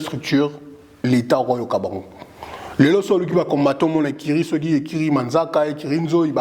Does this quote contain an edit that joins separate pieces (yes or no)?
no